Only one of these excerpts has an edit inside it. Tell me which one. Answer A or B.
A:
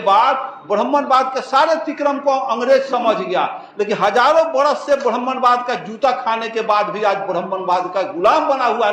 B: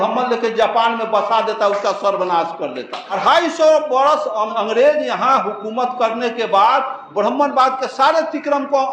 B